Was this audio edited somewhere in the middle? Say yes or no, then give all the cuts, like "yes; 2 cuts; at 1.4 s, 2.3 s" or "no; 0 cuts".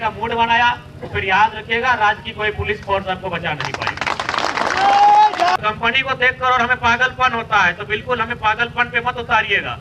yes; 1 cut; at 5.4 s